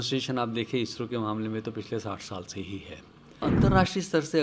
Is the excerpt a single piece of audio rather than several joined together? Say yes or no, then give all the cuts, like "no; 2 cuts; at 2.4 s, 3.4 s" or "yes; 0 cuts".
no; 1 cut; at 3.4 s